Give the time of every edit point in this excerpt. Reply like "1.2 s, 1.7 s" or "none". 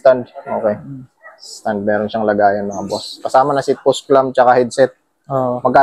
none